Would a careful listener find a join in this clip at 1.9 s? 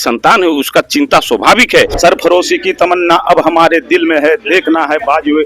yes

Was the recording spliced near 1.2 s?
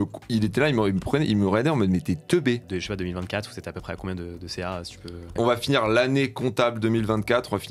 no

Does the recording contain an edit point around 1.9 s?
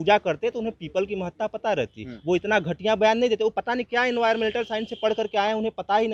no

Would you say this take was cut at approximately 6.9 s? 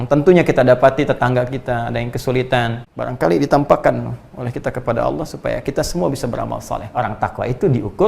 yes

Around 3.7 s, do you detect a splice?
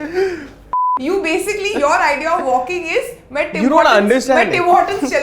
no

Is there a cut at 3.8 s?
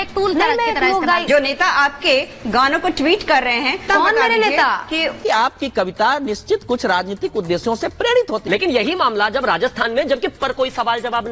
yes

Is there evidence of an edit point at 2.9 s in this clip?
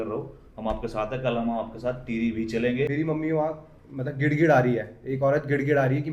yes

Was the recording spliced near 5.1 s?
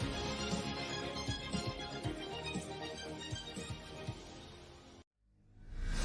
yes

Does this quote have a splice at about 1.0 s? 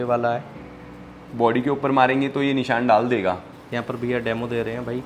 no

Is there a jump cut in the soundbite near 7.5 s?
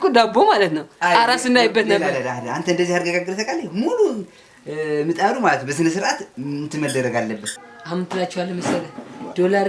yes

